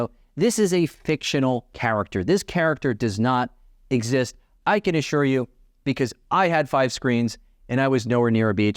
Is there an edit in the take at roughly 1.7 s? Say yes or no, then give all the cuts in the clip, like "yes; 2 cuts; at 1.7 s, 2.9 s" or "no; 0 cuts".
yes; 1 cut; at 1.7 s